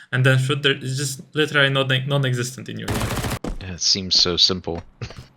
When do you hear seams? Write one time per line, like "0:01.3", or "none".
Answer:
0:03.4